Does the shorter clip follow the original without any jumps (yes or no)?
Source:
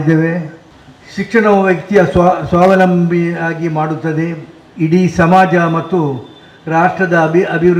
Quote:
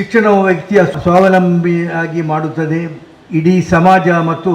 no